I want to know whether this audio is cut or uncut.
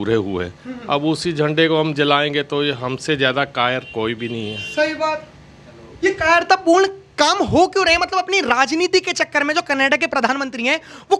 uncut